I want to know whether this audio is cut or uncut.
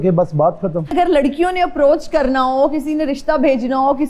cut